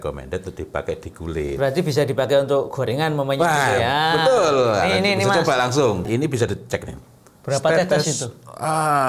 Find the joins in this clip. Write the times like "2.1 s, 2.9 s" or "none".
6.1 s